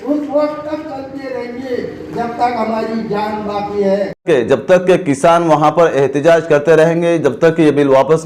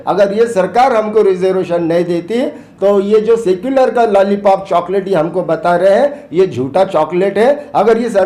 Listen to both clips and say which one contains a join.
first; 1 cut; at 4.2 s

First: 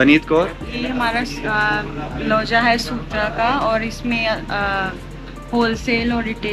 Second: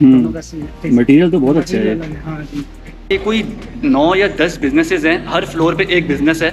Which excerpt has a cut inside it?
second; 1 cut; at 3.1 s

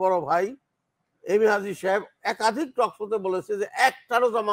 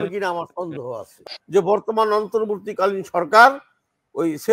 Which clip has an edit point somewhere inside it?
second; 1 cut; at 1.2 s

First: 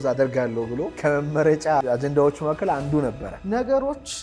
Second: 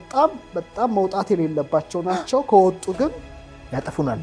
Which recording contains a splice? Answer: first; 3 cuts; at 0.9 s, 1.8 s, 3.3 s

